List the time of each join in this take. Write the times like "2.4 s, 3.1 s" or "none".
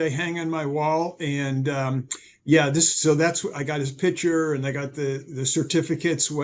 none